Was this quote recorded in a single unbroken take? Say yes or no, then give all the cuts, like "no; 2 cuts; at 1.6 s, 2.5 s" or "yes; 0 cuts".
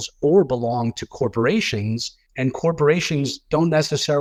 yes; 0 cuts